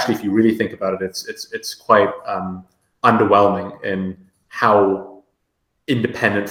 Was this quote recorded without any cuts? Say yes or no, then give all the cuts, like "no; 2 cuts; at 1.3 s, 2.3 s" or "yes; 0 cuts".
yes; 0 cuts